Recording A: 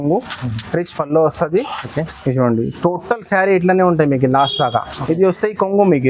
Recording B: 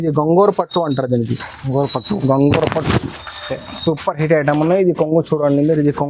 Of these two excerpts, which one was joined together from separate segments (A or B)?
A